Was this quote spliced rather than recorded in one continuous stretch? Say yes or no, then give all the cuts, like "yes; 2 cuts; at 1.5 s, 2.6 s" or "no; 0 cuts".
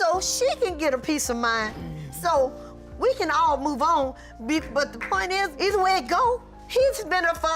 no; 0 cuts